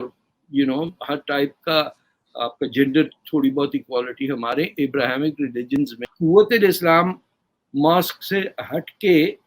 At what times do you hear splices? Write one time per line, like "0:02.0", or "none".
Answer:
0:06.0